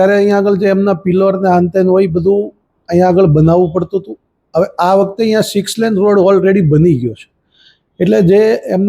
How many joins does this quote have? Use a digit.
0